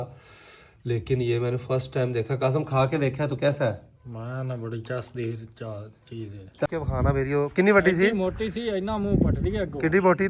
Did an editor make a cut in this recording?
yes; 1 cut; at 6.7 s

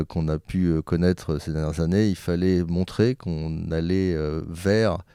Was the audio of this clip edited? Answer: no; 0 cuts

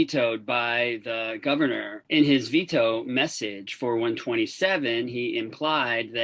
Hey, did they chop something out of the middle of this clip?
yes; 1 cut; at 2.0 s

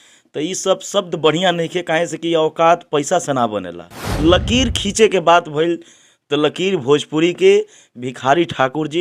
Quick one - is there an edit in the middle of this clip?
yes; 1 cut; at 4.0 s

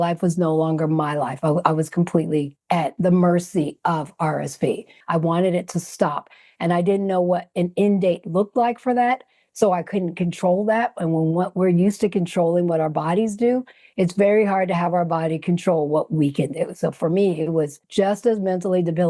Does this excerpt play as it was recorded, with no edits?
no; 2 cuts; at 4.9 s, 17.8 s

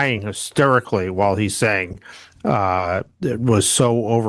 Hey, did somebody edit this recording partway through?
no; 0 cuts

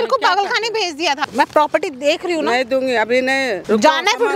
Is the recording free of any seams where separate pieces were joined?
no; 2 cuts; at 1.3 s, 3.6 s

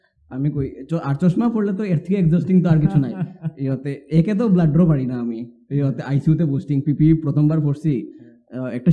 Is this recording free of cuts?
yes; 0 cuts

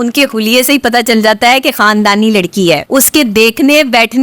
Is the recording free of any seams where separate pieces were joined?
no; 1 cut; at 2.8 s

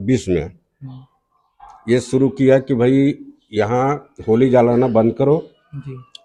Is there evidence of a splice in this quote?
no; 0 cuts

